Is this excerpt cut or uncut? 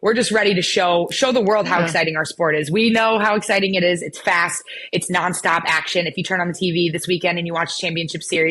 uncut